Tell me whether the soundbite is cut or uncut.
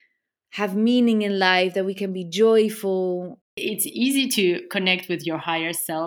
cut